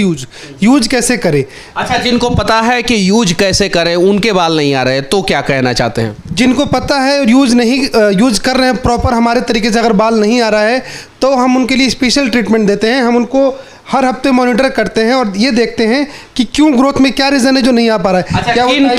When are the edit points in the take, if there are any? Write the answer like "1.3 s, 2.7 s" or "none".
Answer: none